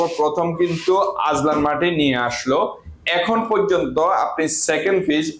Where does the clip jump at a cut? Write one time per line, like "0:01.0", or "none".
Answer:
none

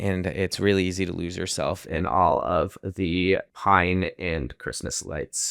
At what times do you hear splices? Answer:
0:03.5

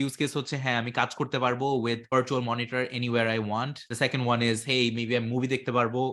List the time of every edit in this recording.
0:02.0
0:03.8

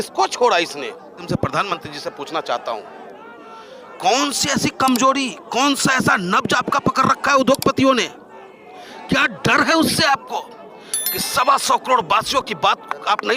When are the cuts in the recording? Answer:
0:01.3

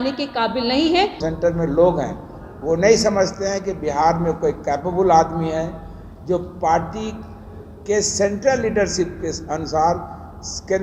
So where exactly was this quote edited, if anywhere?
0:01.2

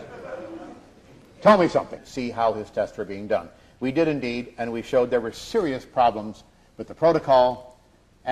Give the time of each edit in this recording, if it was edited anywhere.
none

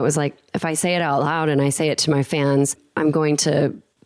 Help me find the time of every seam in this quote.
none

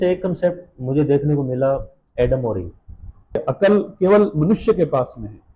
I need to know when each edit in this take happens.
0:03.4

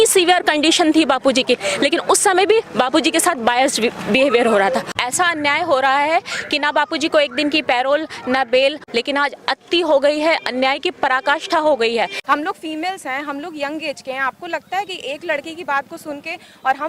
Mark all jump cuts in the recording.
0:04.9
0:08.8
0:12.2

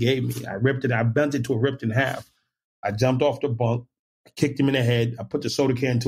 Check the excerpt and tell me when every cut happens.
none

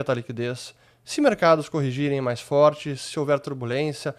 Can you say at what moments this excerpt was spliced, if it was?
none

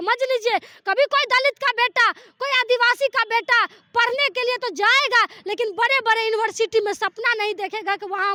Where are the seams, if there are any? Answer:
none

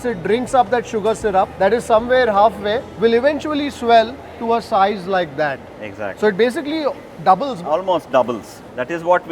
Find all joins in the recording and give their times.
none

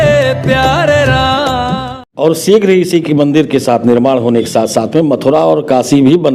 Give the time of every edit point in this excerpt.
0:02.0

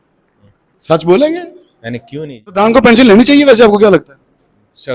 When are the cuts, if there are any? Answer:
0:02.3

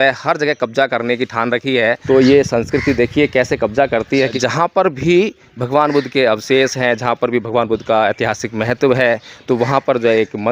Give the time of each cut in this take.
0:02.0
0:04.4

